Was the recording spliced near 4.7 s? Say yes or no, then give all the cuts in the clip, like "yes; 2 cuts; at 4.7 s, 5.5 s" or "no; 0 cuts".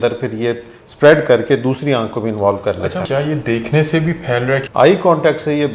yes; 2 cuts; at 3.0 s, 4.7 s